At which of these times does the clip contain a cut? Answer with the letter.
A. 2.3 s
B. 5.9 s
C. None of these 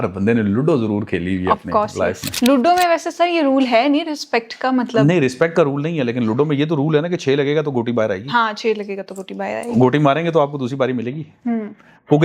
A